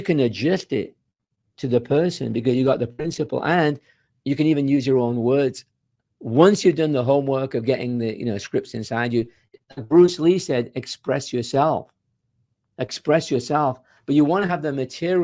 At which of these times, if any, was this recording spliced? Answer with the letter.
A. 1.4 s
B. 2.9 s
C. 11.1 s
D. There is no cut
D